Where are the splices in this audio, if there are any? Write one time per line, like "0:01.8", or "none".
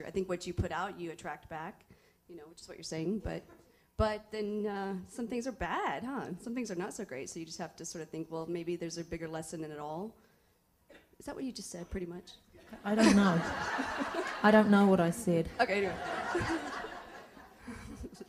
none